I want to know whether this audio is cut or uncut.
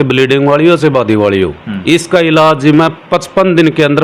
uncut